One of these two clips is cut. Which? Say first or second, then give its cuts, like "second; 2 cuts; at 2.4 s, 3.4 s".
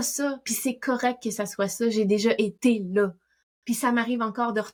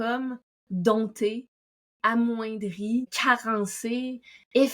second; 1 cut; at 3.1 s